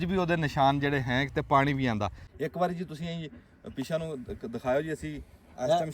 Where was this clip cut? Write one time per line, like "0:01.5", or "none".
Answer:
0:02.2